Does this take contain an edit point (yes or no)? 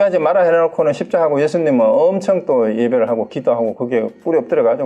no